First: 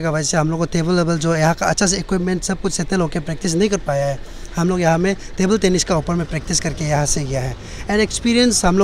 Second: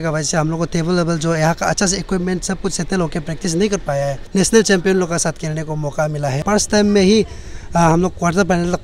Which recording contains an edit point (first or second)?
second